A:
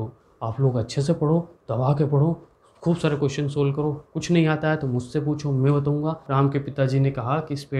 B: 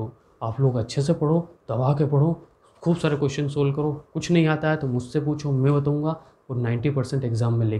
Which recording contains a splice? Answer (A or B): A